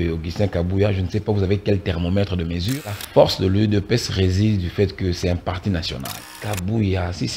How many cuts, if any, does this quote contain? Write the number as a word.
two